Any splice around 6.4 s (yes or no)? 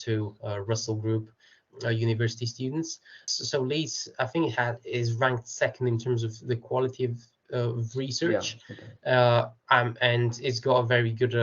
no